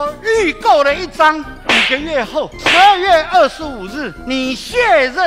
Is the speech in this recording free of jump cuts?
yes; 0 cuts

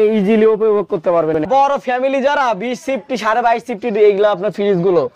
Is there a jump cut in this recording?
yes; 1 cut; at 1.4 s

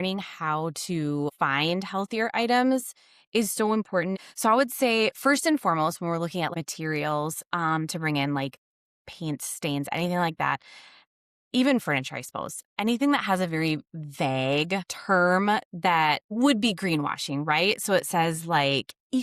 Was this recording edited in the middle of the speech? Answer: yes; 5 cuts; at 1.3 s, 4.2 s, 6.5 s, 14.9 s, 16.3 s

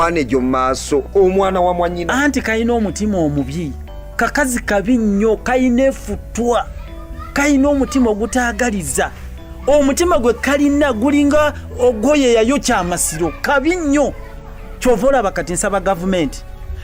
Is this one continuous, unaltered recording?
yes; 0 cuts

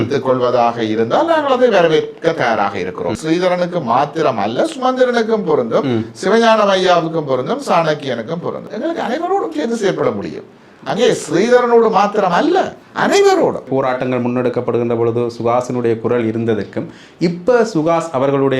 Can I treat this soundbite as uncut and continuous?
no; 3 cuts; at 3.2 s, 8.7 s, 13.7 s

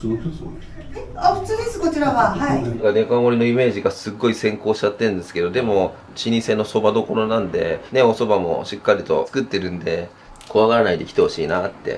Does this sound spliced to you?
yes; 3 cuts; at 6.1 s, 7.8 s, 10.2 s

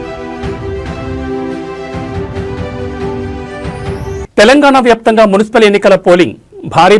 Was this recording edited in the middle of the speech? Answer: no; 0 cuts

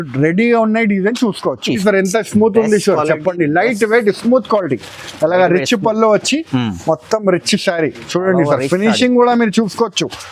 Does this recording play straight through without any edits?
no; 1 cut; at 1.8 s

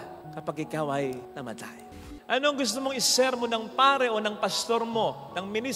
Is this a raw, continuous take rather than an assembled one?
no; 1 cut; at 2.0 s

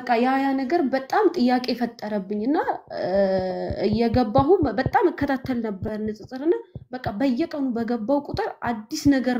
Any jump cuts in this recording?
no; 0 cuts

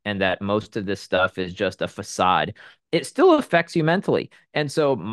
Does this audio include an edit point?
no; 0 cuts

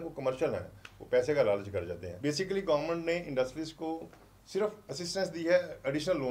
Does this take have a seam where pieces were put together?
yes; 2 cuts; at 2.0 s, 4.8 s

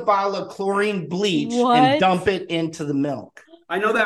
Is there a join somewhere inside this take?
no; 0 cuts

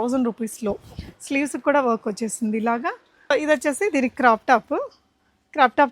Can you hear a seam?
yes; 1 cut; at 3.3 s

